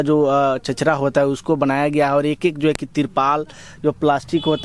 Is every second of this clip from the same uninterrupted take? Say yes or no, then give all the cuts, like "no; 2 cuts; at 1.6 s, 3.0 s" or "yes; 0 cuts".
yes; 0 cuts